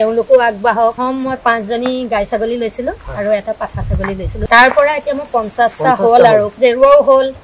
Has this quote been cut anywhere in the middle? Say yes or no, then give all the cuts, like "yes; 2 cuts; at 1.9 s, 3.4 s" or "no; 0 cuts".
yes; 3 cuts; at 1.0 s, 4.3 s, 6.5 s